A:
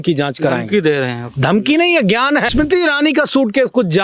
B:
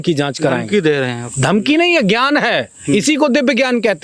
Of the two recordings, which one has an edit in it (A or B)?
A